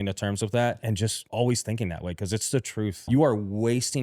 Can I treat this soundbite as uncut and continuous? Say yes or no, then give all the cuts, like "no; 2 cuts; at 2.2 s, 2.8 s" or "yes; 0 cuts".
no; 2 cuts; at 0.9 s, 3.1 s